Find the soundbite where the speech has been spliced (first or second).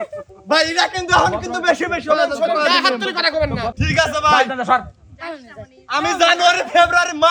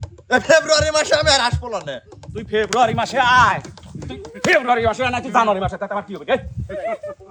first